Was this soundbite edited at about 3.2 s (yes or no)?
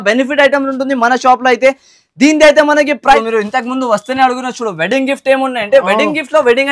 yes